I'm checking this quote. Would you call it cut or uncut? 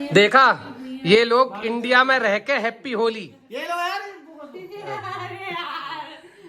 uncut